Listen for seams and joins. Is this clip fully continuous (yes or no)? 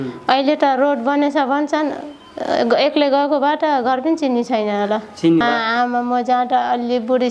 no